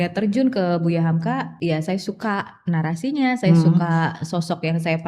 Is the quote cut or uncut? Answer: cut